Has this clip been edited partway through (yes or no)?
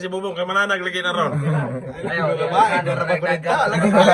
no